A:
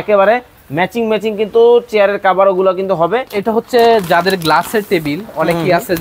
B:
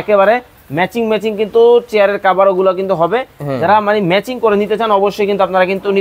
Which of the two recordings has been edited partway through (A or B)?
A